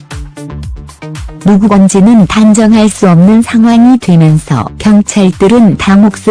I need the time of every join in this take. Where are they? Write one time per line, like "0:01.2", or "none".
0:04.3